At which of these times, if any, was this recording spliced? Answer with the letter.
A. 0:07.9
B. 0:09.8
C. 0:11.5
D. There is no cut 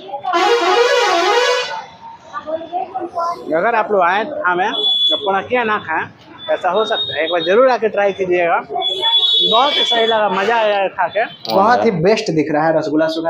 C